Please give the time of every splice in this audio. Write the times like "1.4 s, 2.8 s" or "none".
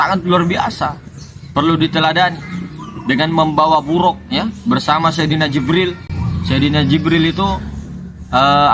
none